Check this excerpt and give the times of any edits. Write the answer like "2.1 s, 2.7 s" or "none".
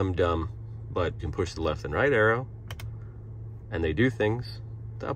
1.2 s